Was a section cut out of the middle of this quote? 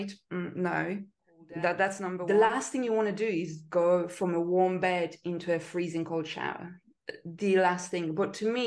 yes; 1 cut; at 2.2 s

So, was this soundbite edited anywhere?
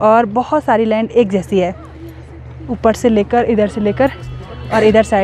no; 0 cuts

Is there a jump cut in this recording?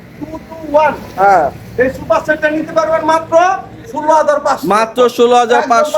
no; 0 cuts

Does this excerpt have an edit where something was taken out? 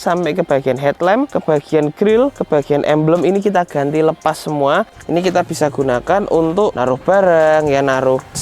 yes; 4 cuts; at 1.3 s, 2.4 s, 5.0 s, 6.8 s

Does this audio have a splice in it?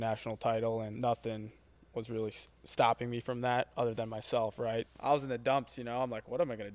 yes; 2 cuts; at 0.9 s, 4.9 s

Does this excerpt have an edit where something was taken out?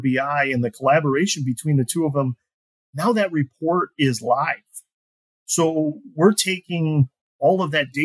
no; 0 cuts

